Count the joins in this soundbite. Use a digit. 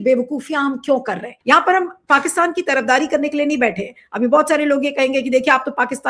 1